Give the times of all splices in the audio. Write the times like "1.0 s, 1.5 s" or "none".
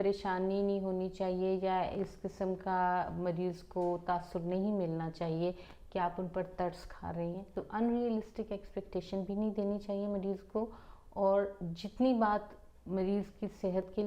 7.5 s